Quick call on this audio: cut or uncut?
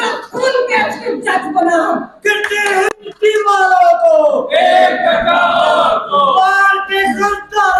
uncut